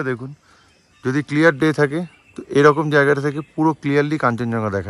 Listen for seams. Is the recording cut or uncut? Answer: uncut